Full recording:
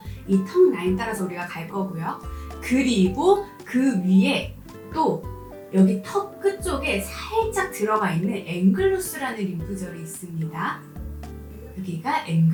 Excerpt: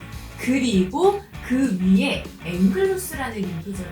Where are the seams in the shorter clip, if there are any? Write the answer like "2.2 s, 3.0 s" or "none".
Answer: 2.4 s